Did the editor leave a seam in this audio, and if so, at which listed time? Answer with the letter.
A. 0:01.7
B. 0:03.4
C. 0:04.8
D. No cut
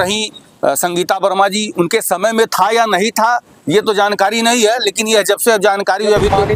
D